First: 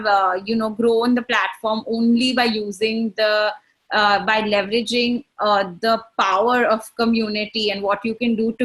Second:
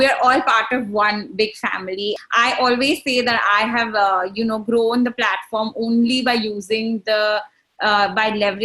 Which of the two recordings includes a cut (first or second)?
second